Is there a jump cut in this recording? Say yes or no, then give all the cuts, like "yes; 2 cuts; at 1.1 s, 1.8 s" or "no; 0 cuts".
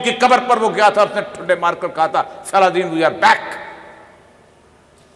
no; 0 cuts